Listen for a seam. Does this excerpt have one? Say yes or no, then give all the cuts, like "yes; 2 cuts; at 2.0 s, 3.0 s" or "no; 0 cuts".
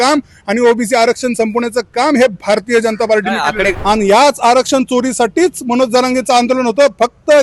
yes; 1 cut; at 3.7 s